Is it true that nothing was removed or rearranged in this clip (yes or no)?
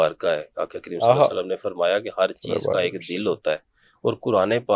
yes